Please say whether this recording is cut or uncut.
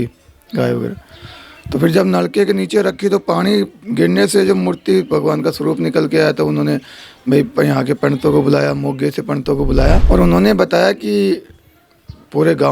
cut